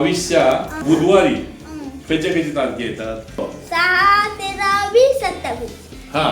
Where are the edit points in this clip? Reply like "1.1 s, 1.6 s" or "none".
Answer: 0.8 s, 3.4 s